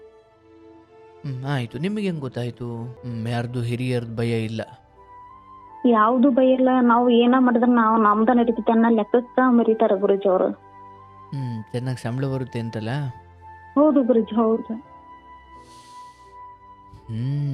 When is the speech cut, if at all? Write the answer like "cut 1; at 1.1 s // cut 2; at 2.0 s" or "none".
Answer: cut 1; at 2.9 s